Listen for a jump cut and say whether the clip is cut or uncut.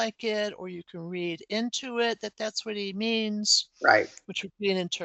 uncut